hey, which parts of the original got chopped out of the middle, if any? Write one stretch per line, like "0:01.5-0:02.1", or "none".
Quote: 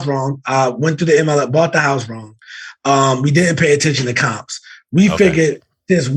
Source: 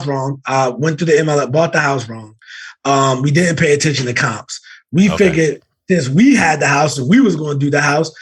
none